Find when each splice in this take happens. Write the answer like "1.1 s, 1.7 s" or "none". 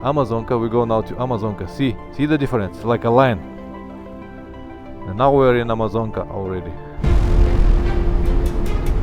7.0 s

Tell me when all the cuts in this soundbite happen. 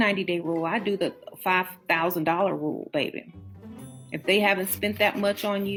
none

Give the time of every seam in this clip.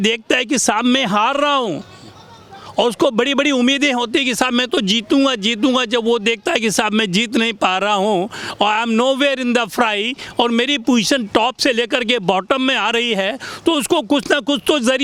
none

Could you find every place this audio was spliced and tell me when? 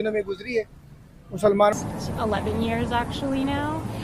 1.7 s

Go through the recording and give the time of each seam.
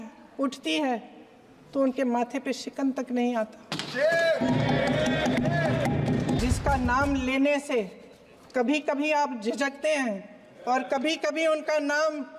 6.4 s

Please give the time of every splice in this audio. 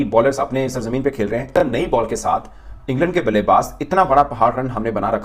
none

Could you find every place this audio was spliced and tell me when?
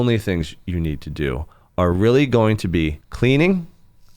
3.0 s

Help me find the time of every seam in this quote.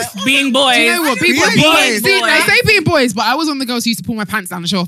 none

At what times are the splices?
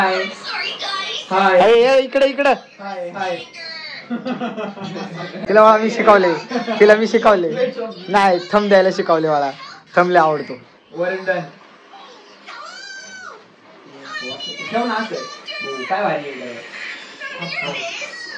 none

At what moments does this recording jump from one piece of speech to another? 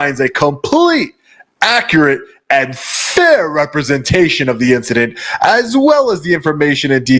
none

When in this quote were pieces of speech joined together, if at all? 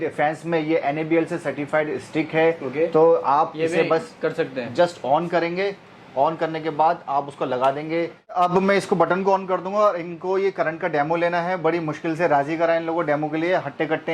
8.4 s

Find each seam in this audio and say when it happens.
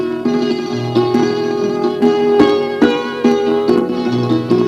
none

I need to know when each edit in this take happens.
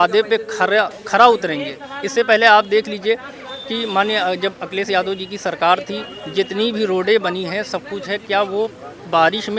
none

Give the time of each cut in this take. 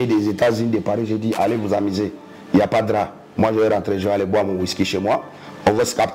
none

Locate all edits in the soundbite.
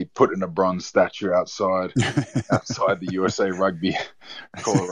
none

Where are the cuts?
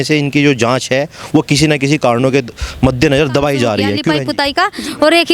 4.2 s

